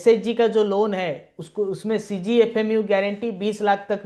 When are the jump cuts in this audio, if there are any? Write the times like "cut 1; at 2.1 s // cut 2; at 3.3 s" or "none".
none